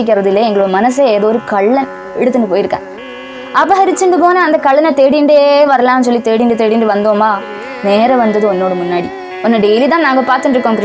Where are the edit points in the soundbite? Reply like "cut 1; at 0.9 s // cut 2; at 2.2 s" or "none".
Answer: cut 1; at 3.1 s // cut 2; at 9.2 s